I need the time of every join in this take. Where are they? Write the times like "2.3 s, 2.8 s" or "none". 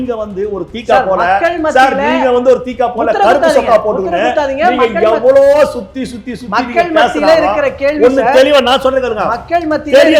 none